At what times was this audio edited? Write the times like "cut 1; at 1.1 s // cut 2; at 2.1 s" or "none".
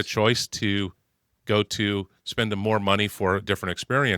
none